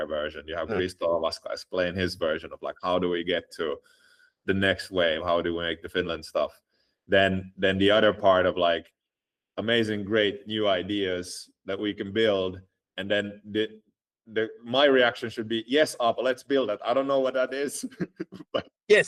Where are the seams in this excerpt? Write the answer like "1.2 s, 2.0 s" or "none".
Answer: none